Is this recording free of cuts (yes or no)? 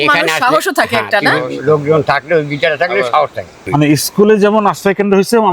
no